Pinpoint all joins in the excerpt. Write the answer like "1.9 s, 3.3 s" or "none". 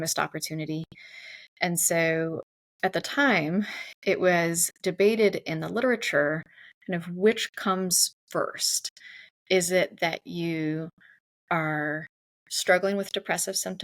2.5 s